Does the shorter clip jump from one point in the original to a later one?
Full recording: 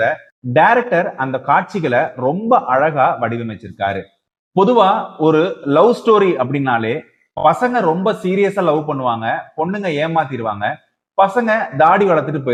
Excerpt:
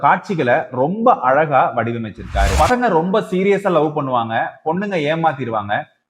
yes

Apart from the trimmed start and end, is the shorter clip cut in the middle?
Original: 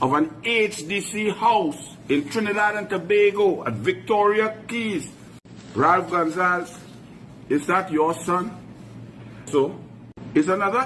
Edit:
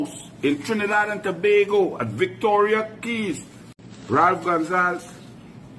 no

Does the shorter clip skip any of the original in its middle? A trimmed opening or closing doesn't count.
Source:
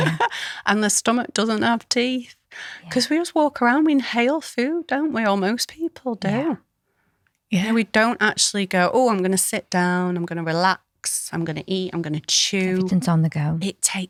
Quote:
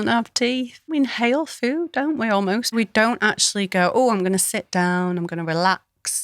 yes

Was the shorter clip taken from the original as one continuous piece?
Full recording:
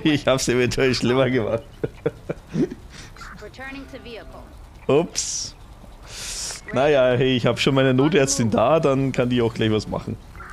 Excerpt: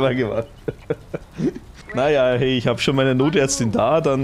no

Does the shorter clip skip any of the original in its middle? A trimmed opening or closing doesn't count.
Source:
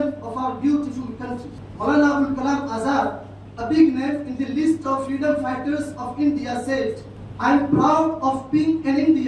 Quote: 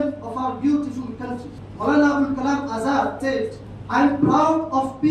yes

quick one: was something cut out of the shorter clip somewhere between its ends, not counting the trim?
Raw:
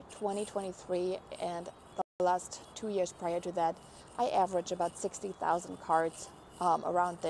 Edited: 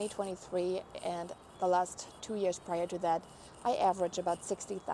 yes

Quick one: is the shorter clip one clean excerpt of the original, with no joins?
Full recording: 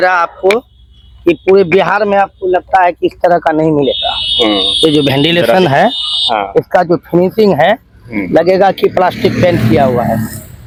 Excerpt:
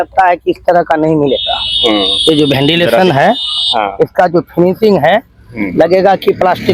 yes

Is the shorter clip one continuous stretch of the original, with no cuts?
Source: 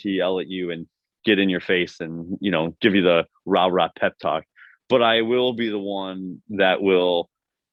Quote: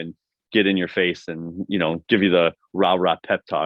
yes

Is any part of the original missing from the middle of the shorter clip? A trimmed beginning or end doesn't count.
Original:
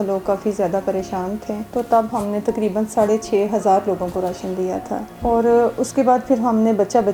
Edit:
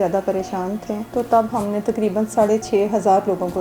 no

